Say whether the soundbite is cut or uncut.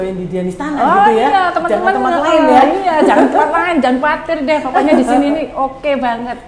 uncut